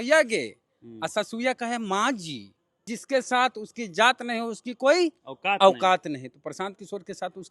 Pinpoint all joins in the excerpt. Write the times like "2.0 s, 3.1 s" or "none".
2.9 s

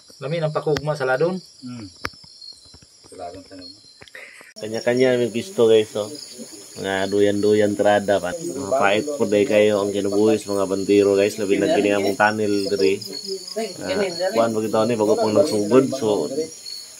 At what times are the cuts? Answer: 4.6 s, 8.3 s

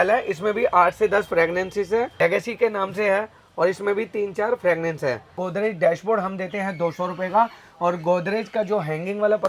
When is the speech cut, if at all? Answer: 2.1 s, 5.4 s

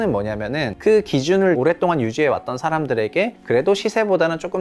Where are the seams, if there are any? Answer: none

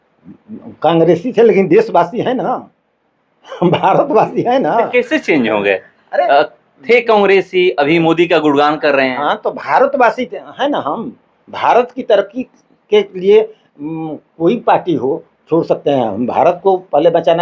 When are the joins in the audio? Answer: none

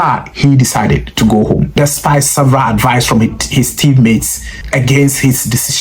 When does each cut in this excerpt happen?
none

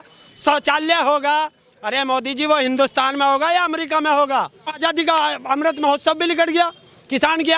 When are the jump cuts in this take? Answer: 4.8 s

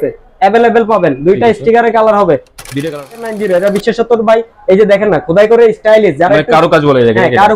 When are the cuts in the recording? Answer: 3.1 s

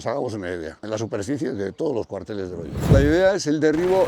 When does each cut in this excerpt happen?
2.9 s

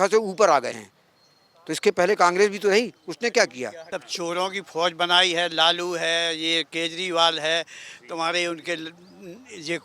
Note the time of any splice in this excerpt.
3.8 s

